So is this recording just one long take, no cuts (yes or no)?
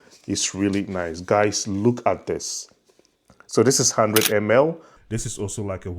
no